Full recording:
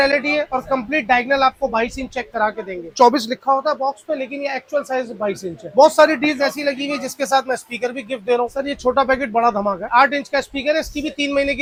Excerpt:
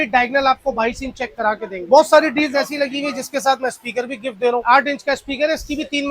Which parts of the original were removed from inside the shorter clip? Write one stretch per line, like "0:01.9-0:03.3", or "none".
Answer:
0:02.7-0:05.6
0:08.5-0:09.9